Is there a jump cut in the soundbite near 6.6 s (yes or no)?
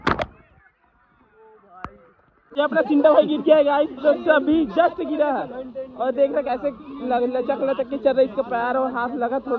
no